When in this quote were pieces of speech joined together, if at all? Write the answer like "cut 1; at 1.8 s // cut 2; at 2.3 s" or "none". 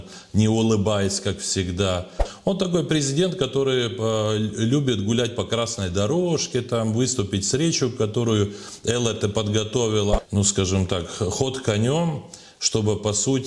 cut 1; at 2.2 s // cut 2; at 10.2 s